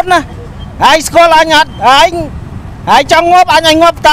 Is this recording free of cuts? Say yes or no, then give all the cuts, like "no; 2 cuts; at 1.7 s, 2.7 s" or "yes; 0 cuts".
yes; 0 cuts